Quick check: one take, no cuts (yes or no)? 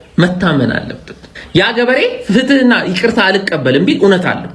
yes